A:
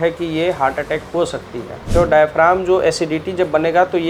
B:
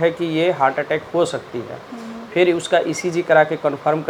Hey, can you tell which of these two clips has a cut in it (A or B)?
A